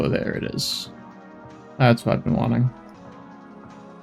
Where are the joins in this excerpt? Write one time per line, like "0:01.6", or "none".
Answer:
0:02.9